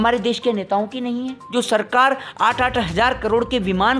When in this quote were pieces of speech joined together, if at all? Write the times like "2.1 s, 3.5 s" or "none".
1.4 s